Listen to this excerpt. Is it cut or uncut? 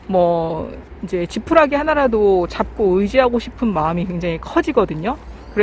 uncut